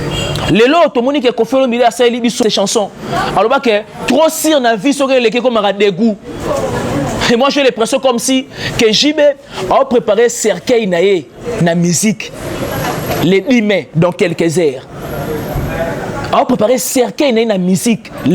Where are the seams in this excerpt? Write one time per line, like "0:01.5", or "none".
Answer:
0:02.4